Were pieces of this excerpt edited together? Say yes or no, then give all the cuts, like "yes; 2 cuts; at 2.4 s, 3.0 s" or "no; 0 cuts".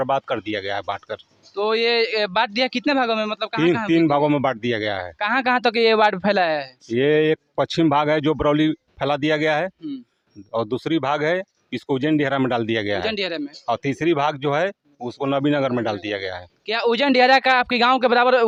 no; 0 cuts